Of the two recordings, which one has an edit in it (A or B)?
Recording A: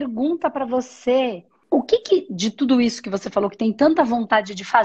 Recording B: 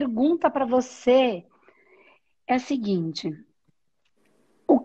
A